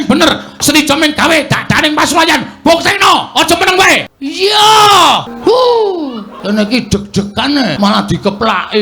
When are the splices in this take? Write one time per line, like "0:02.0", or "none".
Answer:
0:04.2
0:05.3
0:06.3
0:07.7